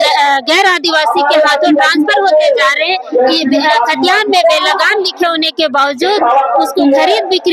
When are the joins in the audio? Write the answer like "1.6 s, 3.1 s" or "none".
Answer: none